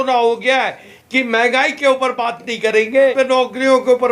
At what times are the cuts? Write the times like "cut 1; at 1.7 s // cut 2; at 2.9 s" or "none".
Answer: cut 1; at 0.9 s // cut 2; at 3.1 s